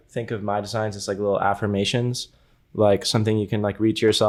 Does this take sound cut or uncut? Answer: uncut